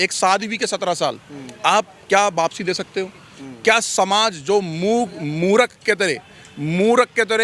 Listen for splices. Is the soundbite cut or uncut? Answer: uncut